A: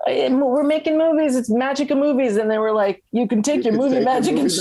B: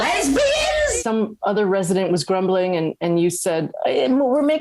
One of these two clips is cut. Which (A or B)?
B